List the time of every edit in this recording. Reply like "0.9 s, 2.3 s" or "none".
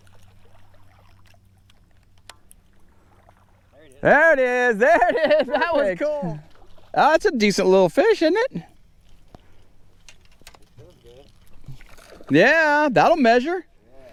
none